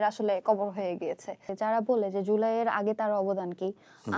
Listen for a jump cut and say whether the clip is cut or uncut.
cut